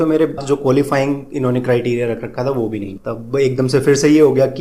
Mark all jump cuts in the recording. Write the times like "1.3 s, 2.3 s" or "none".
none